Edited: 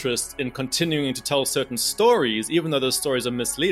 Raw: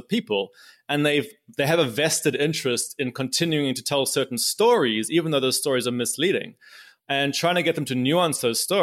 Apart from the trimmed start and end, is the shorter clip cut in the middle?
no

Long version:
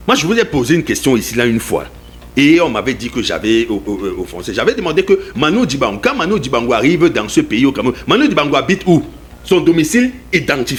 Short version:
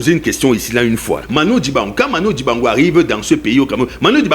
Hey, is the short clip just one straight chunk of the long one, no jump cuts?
no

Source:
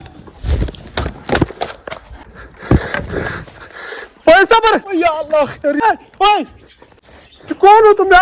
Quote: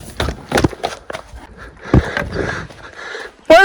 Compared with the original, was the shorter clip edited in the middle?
no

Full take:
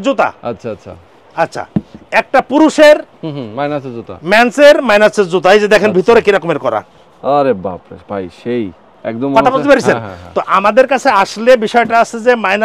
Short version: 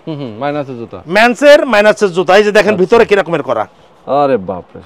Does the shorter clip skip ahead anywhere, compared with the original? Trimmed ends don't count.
no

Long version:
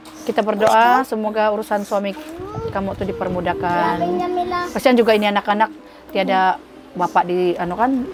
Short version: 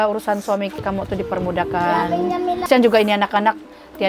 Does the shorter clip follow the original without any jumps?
no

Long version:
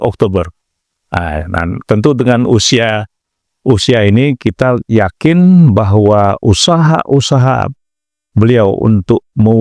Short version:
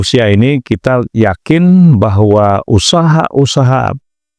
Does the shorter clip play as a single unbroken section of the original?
yes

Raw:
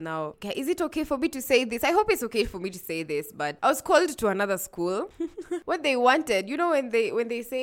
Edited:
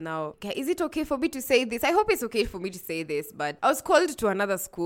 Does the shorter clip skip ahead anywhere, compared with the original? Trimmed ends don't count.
no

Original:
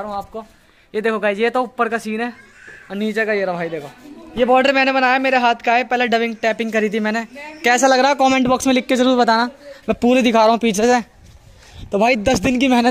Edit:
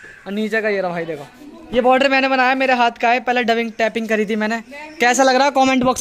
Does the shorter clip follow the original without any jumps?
yes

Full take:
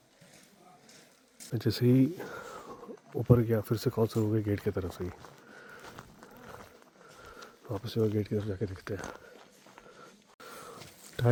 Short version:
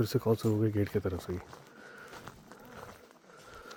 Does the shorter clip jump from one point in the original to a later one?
no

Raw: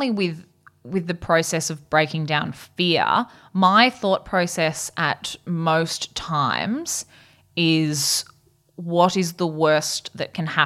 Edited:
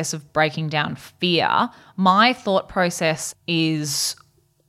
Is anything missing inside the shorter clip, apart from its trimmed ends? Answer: yes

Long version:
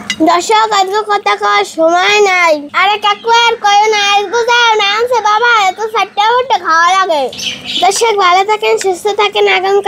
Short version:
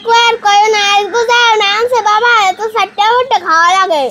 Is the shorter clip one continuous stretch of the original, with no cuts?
yes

